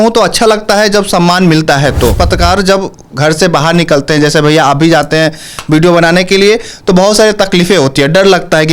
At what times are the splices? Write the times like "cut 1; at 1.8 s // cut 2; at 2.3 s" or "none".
cut 1; at 2.2 s